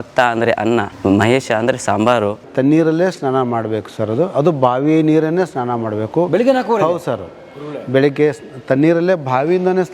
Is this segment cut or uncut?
cut